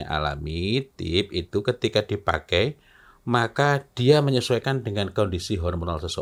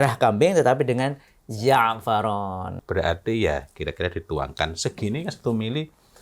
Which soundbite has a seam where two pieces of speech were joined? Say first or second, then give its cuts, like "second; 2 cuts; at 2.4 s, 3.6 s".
second; 1 cut; at 2.8 s